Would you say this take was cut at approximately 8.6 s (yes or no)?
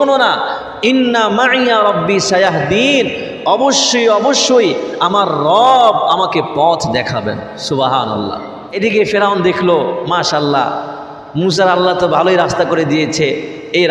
yes